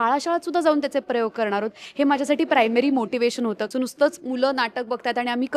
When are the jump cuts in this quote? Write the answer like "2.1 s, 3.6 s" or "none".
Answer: 3.6 s